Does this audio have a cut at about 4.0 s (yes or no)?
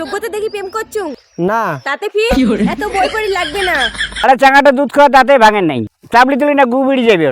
yes